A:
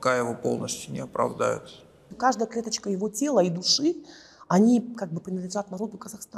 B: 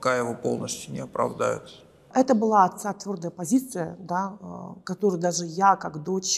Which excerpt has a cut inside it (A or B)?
A